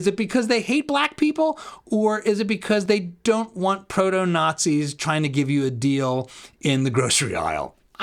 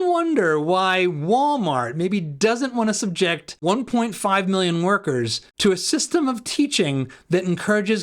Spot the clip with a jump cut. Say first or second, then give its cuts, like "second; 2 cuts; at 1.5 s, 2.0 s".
second; 2 cuts; at 3.5 s, 5.4 s